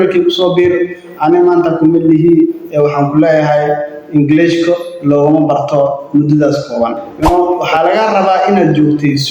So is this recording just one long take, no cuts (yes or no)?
no